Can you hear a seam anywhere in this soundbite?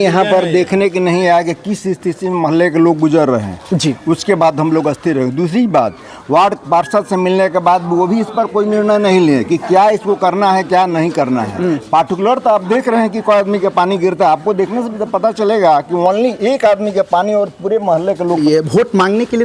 no; 0 cuts

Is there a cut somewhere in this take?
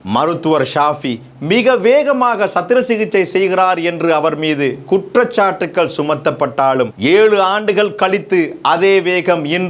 no; 0 cuts

